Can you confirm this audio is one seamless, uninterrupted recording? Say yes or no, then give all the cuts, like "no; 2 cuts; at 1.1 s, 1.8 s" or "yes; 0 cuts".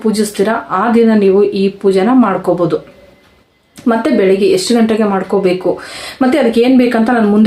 yes; 0 cuts